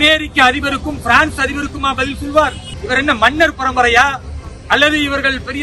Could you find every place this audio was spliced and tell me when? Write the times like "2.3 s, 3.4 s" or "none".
2.7 s

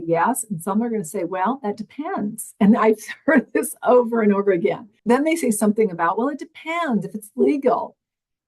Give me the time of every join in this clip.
4.9 s

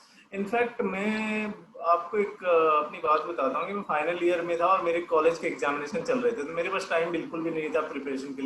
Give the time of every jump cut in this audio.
none

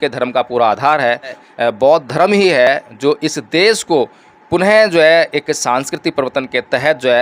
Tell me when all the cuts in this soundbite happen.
1.4 s

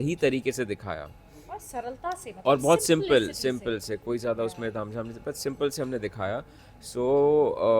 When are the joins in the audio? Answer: none

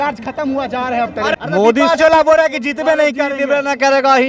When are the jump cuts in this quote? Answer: 1.4 s

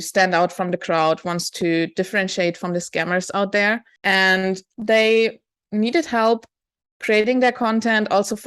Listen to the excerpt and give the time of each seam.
3.9 s, 4.7 s

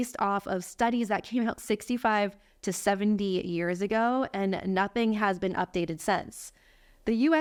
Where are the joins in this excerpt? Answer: none

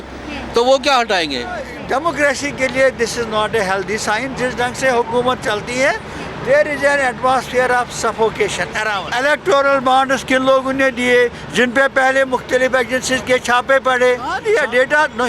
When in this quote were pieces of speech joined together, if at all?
1.7 s, 9.0 s, 14.4 s

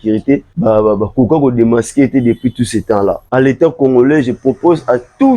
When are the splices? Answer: 3.2 s

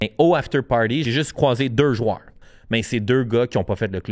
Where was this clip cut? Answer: 1.0 s, 2.5 s

